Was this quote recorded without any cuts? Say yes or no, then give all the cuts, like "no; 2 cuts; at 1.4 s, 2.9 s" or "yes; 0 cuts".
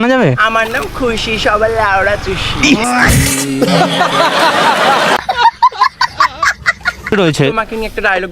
no; 1 cut; at 7.3 s